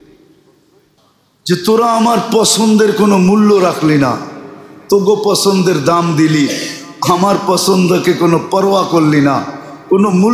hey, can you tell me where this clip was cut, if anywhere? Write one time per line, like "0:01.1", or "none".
0:01.0